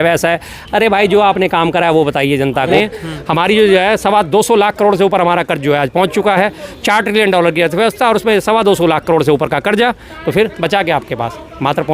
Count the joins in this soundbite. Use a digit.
1